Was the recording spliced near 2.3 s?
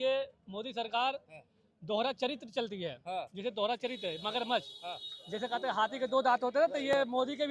no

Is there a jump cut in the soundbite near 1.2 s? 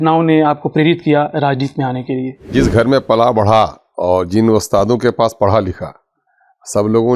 no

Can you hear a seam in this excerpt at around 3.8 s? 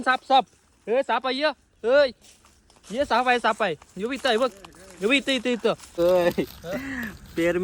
no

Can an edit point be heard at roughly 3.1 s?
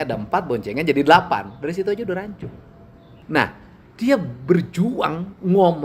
yes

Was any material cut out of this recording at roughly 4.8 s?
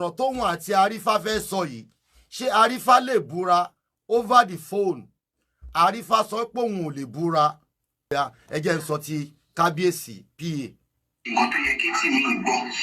no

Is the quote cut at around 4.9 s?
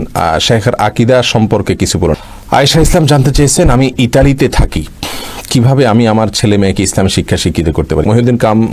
no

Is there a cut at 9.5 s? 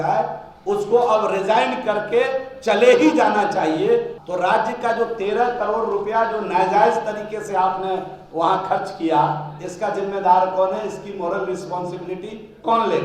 no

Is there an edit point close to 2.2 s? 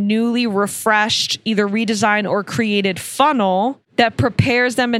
no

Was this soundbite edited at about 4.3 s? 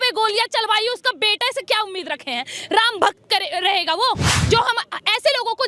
yes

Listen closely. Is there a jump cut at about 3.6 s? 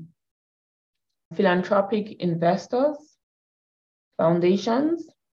no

